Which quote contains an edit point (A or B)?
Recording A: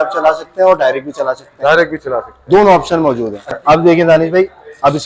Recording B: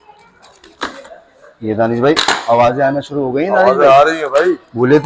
A